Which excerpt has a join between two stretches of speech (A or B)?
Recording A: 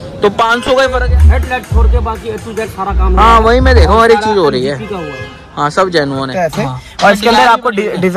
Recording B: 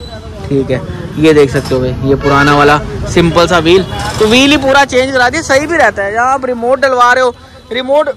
A